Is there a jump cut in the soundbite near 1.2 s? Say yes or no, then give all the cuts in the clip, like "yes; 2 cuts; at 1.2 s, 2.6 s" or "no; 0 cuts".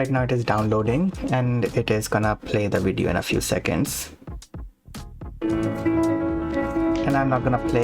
no; 2 cuts; at 3.9 s, 5.4 s